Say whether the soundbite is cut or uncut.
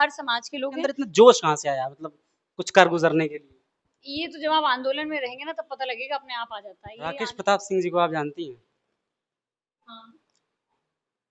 cut